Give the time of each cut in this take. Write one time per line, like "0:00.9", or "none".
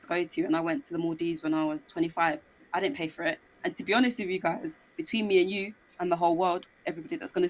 none